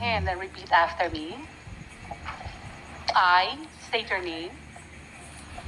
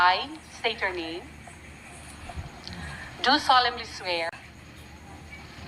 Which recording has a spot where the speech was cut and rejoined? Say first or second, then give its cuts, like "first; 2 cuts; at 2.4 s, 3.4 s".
second; 1 cut; at 4.3 s